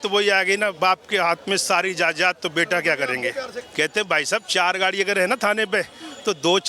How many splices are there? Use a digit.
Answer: 1